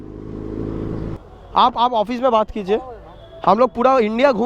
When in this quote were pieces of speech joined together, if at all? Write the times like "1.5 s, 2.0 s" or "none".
1.2 s